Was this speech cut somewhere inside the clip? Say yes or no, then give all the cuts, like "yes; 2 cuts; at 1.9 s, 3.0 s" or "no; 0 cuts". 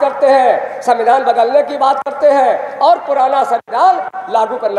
no; 0 cuts